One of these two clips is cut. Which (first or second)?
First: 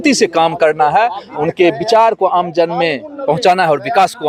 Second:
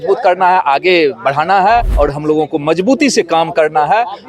second